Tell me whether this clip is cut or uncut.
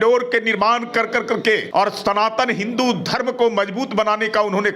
cut